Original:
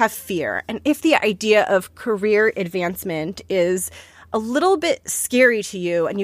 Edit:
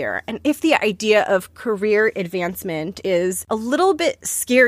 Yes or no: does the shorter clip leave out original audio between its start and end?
yes